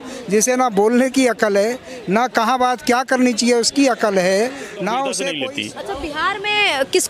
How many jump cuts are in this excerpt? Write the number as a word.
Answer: one